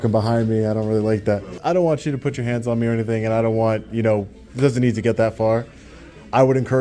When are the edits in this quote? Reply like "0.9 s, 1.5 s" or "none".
1.6 s